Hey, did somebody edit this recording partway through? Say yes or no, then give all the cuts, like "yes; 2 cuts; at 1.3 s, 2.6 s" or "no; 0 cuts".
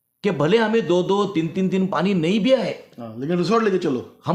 no; 0 cuts